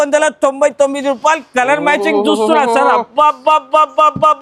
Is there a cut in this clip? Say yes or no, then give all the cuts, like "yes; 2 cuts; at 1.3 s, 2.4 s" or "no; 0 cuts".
no; 0 cuts